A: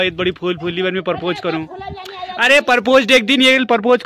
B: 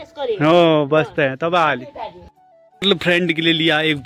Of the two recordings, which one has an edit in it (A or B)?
B